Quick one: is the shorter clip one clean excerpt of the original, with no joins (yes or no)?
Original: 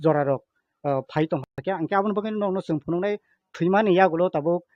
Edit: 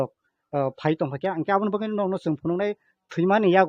no